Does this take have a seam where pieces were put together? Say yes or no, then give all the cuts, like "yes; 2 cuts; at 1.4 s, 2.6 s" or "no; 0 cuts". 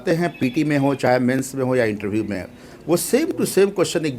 no; 0 cuts